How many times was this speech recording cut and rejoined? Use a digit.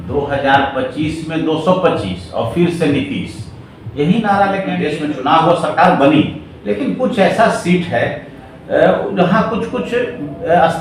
1